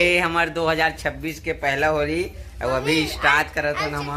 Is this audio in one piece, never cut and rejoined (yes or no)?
yes